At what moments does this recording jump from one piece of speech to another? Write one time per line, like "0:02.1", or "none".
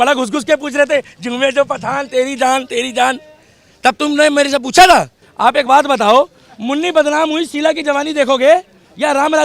0:05.2